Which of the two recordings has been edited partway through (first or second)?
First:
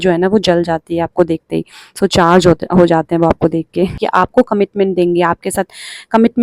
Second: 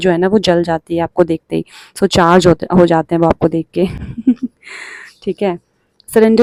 first